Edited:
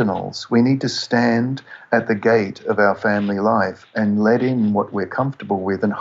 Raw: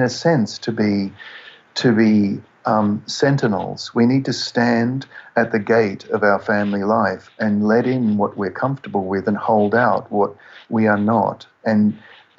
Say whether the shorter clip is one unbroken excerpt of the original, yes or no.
yes